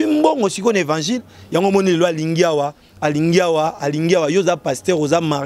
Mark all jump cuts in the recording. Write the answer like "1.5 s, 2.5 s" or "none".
none